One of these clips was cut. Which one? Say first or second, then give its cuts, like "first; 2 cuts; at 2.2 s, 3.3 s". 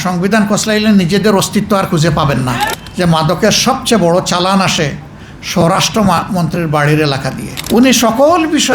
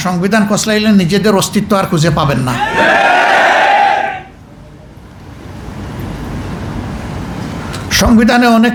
first; 2 cuts; at 2.7 s, 7.5 s